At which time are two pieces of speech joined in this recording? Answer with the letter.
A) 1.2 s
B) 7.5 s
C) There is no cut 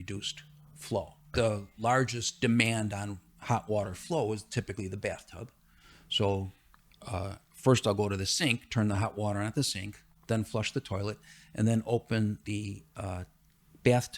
A